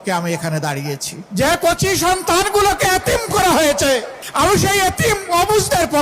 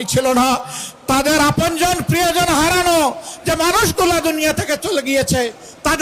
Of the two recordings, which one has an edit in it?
first; 2 cuts; at 1.1 s, 4.2 s

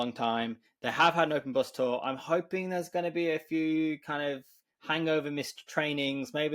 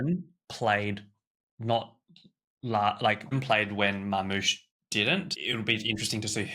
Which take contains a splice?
second; 2 cuts; at 3.4 s, 5.2 s

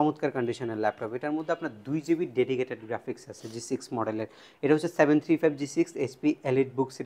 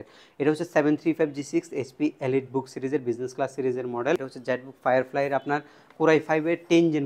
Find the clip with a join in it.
second; 1 cut; at 4.3 s

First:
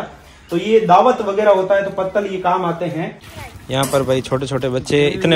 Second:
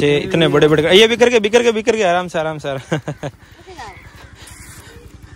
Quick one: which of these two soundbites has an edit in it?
first; 1 cut; at 3.2 s

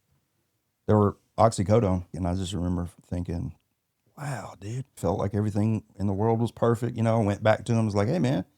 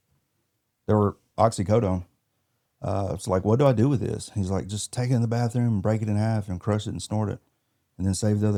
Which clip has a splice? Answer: first; 2 cuts; at 2.1 s, 5.0 s

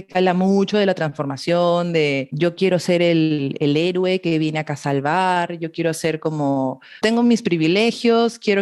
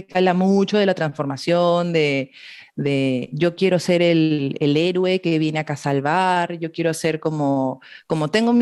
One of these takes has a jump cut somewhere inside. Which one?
first; 2 cuts; at 2.3 s, 7.0 s

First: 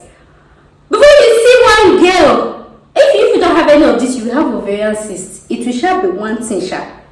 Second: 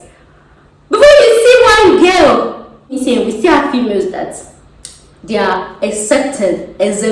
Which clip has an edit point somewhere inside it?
second; 1 cut; at 3.0 s

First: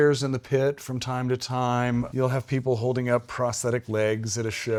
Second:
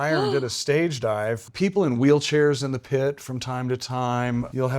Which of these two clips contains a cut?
second; 1 cut; at 1.4 s

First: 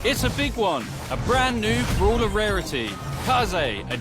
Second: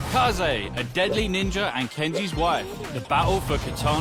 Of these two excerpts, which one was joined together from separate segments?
first; 1 cut; at 1.8 s

